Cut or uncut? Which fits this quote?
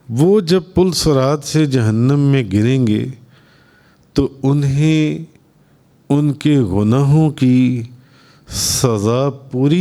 uncut